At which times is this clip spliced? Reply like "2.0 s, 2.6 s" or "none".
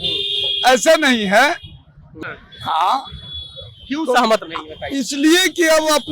2.1 s

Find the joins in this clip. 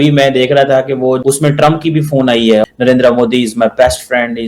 1.2 s, 2.6 s

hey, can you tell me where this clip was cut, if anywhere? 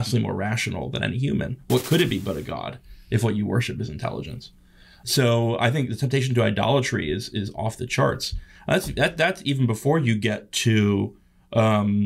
5.0 s

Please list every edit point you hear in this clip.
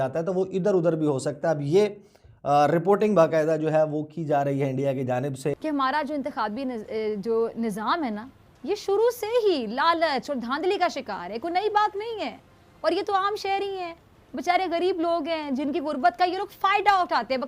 5.6 s

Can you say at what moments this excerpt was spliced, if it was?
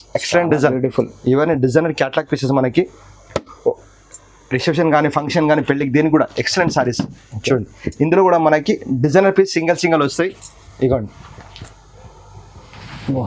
none

